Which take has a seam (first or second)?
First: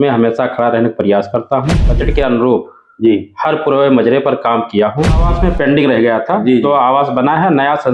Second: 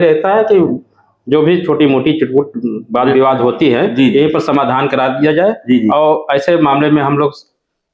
first